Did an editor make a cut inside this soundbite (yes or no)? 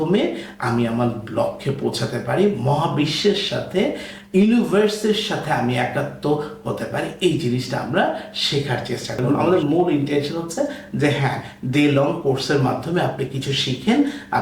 yes